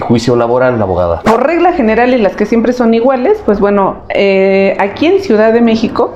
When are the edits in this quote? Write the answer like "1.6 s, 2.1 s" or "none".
1.2 s